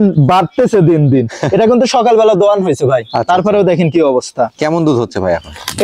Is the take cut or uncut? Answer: uncut